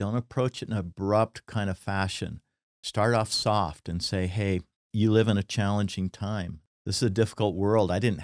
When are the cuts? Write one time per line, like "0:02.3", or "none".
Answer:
0:04.8
0:06.6